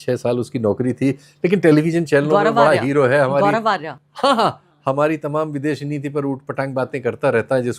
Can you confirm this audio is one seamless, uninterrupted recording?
yes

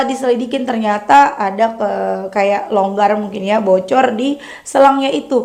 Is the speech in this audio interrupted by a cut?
no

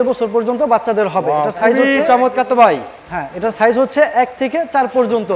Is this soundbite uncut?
yes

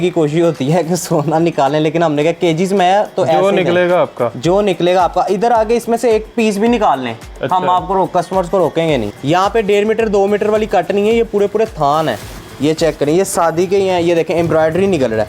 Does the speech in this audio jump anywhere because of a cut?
yes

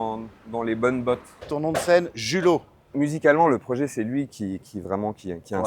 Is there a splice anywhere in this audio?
yes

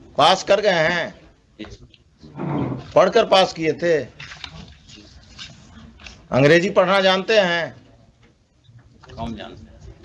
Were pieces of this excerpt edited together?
no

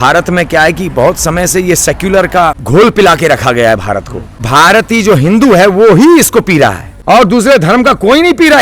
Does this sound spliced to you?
yes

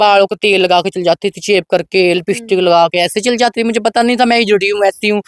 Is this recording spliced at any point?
no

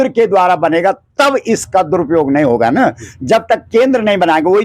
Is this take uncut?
yes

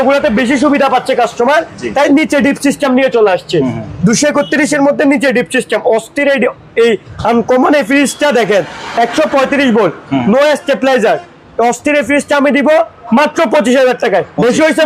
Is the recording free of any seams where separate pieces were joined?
yes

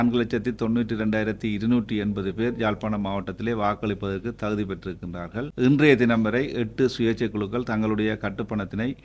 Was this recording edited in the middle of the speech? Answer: yes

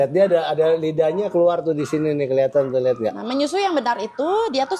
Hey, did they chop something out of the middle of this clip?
no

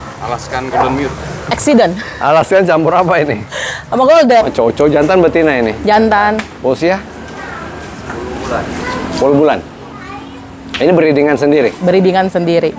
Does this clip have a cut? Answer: yes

